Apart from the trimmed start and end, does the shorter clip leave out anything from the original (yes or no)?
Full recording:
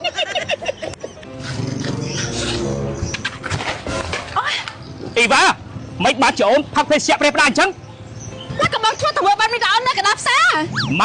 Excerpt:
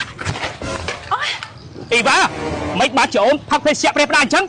no